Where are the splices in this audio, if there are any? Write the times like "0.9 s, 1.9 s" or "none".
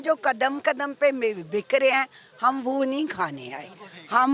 none